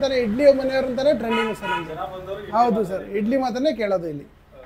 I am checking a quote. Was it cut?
no; 0 cuts

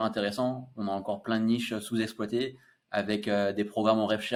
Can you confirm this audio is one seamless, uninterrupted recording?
yes; 0 cuts

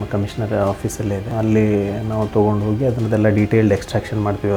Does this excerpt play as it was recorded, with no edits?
no; 1 cut; at 1.3 s

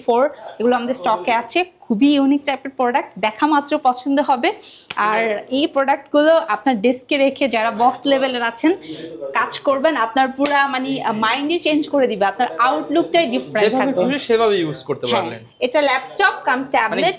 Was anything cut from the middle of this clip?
no; 0 cuts

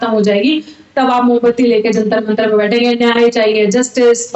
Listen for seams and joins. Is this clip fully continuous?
yes; 0 cuts

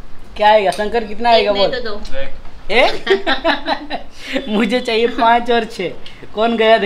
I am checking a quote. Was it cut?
no; 0 cuts

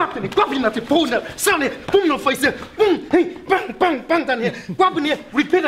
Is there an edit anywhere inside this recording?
no; 0 cuts

